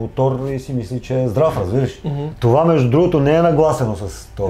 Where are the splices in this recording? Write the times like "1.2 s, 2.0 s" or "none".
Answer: 2.3 s